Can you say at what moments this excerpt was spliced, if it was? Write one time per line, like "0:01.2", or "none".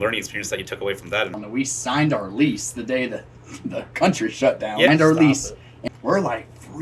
0:01.4
0:04.9
0:05.8